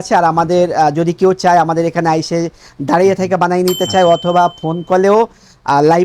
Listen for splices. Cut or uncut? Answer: uncut